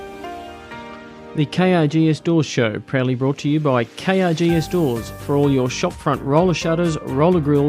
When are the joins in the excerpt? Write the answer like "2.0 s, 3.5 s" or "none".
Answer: 1.3 s